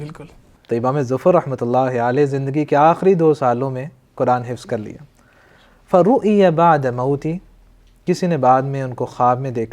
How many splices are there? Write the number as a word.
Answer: zero